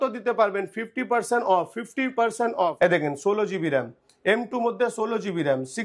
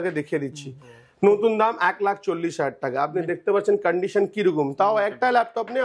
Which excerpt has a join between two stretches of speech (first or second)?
first